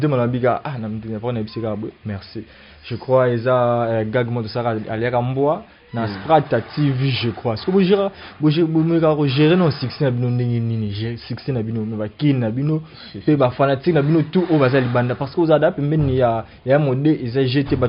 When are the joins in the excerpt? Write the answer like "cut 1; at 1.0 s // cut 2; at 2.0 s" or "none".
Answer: none